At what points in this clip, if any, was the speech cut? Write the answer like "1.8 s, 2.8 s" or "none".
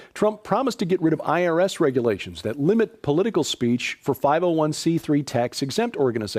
2.3 s